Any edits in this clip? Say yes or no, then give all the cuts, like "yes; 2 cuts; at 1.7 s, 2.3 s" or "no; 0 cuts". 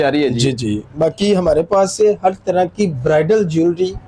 no; 0 cuts